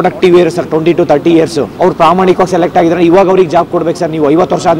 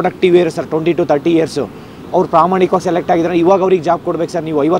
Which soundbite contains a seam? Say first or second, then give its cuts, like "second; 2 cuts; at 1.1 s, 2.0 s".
first; 1 cut; at 1.6 s